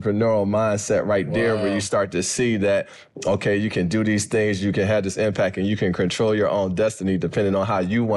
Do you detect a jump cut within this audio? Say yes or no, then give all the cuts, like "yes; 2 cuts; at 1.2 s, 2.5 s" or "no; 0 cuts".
no; 0 cuts